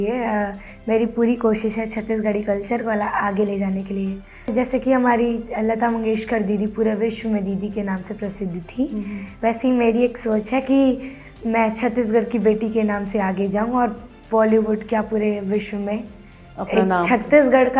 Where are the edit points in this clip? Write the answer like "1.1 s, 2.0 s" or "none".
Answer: 4.5 s